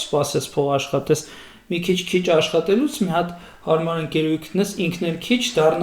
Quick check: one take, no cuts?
yes; 0 cuts

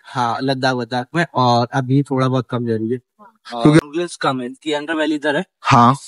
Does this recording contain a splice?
yes; 1 cut; at 3.8 s

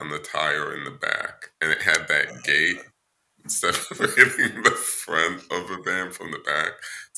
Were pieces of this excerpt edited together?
no; 0 cuts

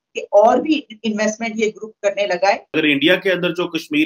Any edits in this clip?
yes; 1 cut; at 2.7 s

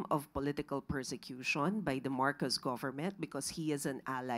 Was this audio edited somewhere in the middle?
no; 0 cuts

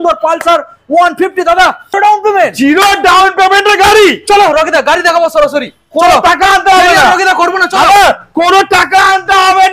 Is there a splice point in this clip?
yes; 1 cut; at 1.9 s

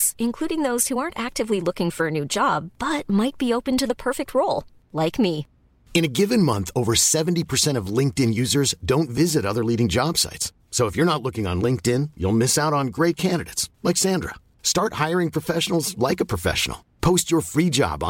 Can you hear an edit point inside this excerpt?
no; 0 cuts

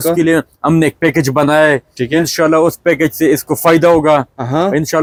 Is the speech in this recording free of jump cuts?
yes; 0 cuts

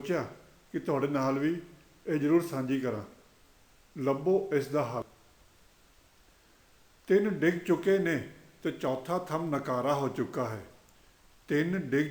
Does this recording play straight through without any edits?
no; 1 cut; at 5.0 s

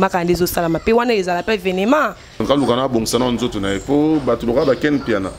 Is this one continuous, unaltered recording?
no; 1 cut; at 2.4 s

